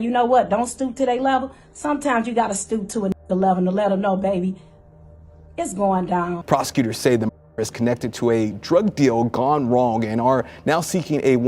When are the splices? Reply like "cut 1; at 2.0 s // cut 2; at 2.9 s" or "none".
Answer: cut 1; at 6.4 s